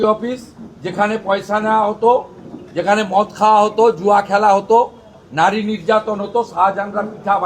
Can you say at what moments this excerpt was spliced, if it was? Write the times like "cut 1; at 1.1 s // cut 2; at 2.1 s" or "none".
none